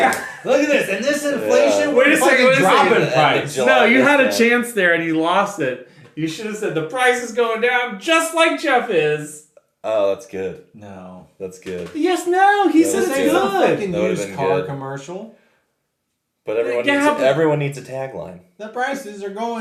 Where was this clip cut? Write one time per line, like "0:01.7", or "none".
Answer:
none